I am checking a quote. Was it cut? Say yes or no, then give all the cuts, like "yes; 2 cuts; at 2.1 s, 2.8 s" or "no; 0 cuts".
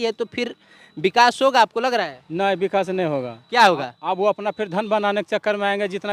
no; 0 cuts